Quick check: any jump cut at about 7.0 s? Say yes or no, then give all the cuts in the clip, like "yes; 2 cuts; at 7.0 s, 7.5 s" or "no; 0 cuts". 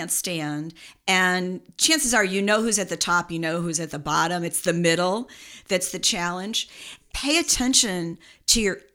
yes; 1 cut; at 7.0 s